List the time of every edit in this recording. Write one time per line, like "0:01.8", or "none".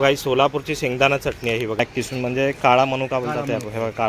0:01.8